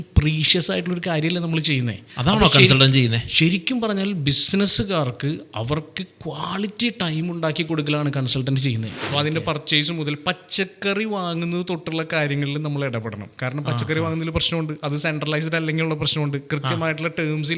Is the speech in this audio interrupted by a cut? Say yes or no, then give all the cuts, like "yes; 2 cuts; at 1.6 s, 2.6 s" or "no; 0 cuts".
yes; 2 cuts; at 2.0 s, 9.0 s